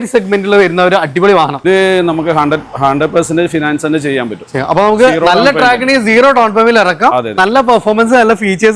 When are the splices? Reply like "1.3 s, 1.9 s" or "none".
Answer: 1.6 s, 7.3 s